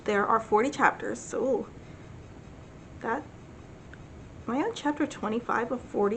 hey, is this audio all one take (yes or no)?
yes